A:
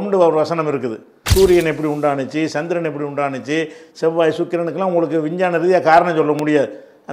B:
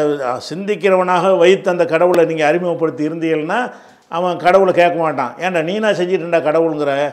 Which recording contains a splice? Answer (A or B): A